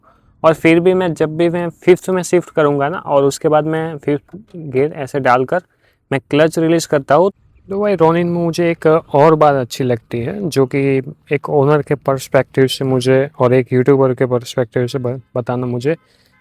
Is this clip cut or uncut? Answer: cut